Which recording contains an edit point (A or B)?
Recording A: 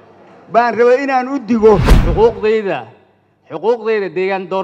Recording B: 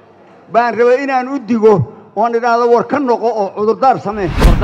A